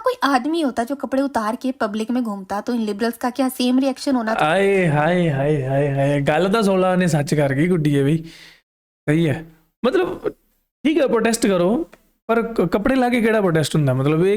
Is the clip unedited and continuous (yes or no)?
yes